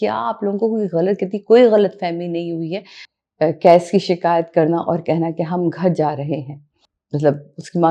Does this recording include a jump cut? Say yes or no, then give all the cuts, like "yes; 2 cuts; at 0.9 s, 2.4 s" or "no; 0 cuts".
yes; 1 cut; at 3.0 s